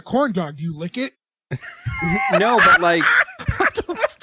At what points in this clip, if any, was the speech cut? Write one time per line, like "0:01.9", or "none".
none